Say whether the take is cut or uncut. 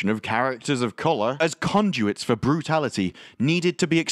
cut